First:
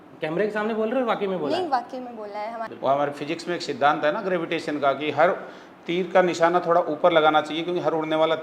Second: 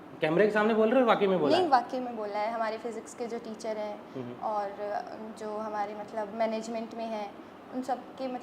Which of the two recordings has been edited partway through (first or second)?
first